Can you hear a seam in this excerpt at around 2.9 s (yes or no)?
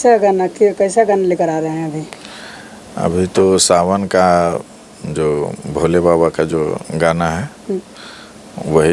no